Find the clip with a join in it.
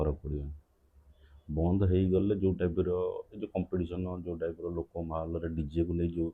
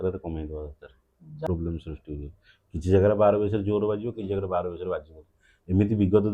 second; 1 cut; at 1.3 s

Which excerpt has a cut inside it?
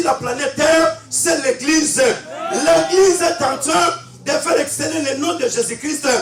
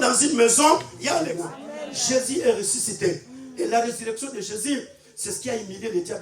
second; 1 cut; at 1.1 s

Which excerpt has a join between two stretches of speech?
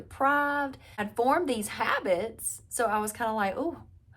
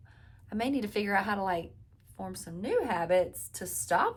first; 1 cut; at 1.1 s

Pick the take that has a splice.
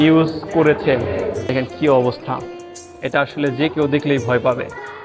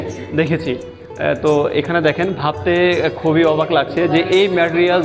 first; 1 cut; at 1.5 s

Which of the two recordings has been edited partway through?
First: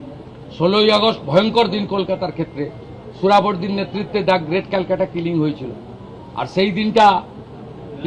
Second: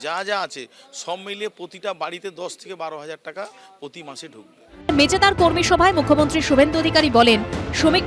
second; 1 cut; at 4.9 s

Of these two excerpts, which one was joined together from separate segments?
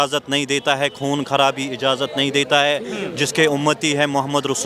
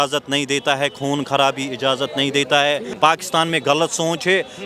second; 1 cut; at 2.9 s

